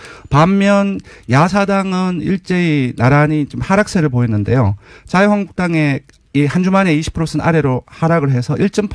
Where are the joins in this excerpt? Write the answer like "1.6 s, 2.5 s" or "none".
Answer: 2.6 s